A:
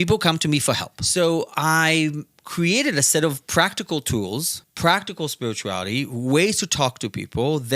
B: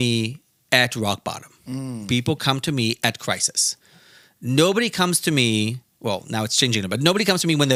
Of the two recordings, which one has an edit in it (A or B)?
A